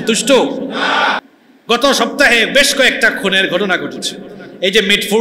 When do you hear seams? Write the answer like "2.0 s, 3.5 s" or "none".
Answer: 1.3 s

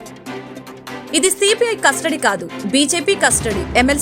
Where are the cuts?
1.0 s

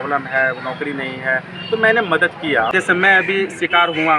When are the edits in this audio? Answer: 2.7 s

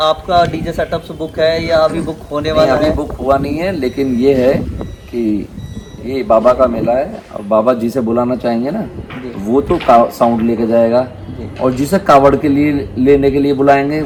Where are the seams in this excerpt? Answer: none

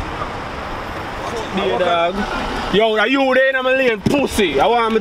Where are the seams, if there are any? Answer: 1.5 s

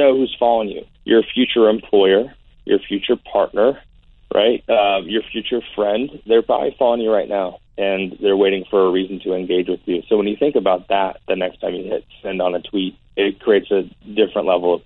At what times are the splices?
0.8 s, 7.6 s, 13.0 s

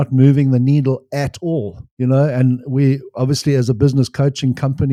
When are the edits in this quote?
none

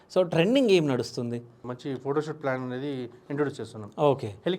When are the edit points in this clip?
1.7 s

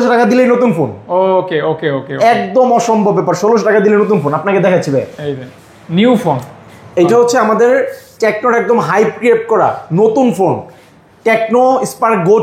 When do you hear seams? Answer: none

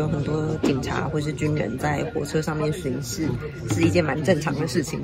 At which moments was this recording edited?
none

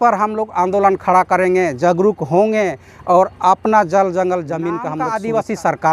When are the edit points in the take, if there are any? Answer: 5.0 s

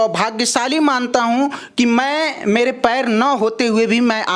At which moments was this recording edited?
none

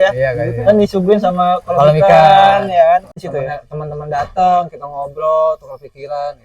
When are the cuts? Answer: 3.2 s

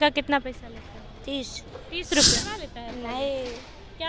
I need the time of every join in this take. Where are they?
2.4 s

